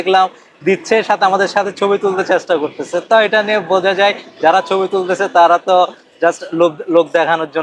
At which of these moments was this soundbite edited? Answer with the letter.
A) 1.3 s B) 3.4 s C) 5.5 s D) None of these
D